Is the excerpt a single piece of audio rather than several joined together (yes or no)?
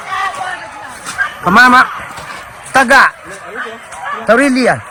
yes